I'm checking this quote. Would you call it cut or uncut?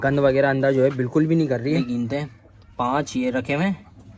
cut